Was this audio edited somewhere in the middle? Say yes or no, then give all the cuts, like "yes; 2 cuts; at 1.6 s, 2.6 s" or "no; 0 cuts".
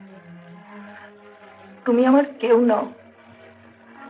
no; 0 cuts